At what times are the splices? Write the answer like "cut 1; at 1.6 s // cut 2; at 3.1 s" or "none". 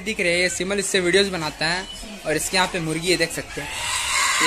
none